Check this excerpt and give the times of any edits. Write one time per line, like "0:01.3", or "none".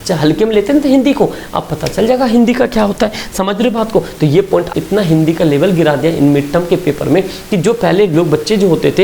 0:04.7